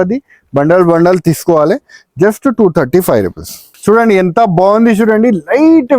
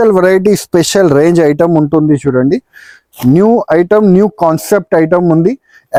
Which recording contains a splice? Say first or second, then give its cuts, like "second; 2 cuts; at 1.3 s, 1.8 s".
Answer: first; 1 cut; at 3.7 s